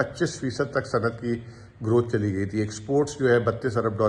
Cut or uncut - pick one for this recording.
uncut